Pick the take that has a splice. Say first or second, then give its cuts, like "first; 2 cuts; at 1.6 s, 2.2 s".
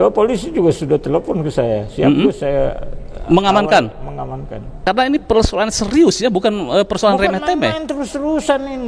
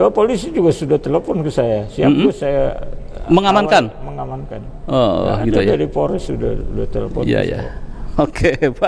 first; 1 cut; at 4.7 s